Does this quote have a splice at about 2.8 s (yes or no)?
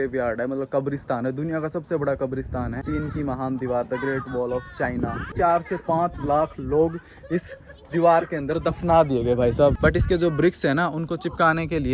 yes